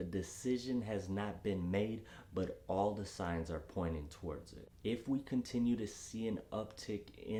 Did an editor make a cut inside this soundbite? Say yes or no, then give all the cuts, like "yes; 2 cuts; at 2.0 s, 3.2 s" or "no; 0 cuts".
no; 0 cuts